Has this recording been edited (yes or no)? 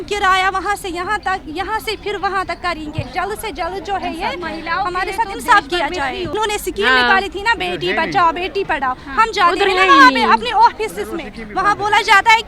yes